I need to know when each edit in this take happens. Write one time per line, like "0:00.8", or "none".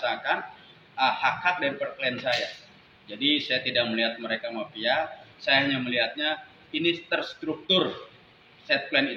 none